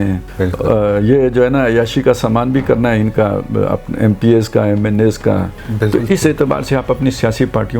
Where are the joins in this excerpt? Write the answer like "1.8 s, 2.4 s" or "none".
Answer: 5.6 s